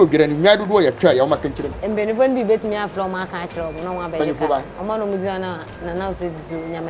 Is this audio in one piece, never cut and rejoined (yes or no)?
no